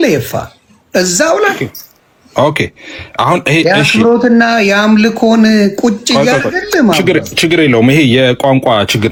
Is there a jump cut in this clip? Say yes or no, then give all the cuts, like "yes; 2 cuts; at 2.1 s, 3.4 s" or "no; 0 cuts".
no; 0 cuts